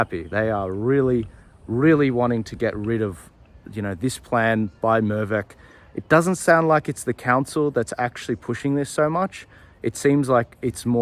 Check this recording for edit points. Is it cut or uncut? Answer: uncut